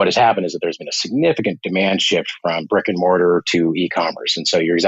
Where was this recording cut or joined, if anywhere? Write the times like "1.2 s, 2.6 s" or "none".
none